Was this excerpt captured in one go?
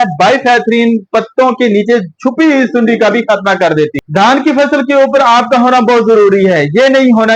no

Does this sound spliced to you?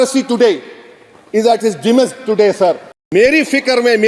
yes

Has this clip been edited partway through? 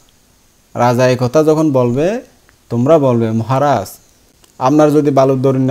no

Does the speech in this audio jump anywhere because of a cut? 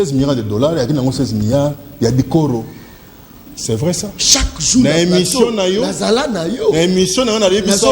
yes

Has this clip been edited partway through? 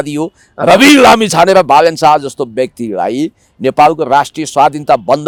no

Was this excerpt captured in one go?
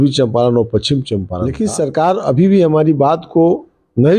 no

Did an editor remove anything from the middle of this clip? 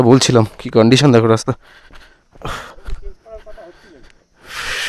no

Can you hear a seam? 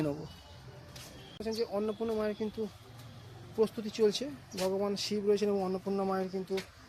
yes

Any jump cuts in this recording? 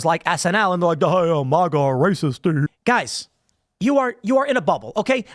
yes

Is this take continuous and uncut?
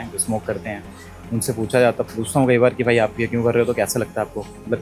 yes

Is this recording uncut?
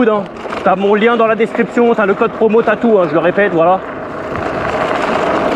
yes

